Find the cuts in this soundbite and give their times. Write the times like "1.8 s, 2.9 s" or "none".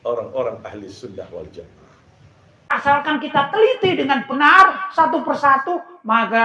2.7 s